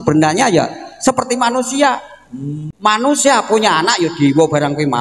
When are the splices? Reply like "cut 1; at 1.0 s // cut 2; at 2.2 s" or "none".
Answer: cut 1; at 2.7 s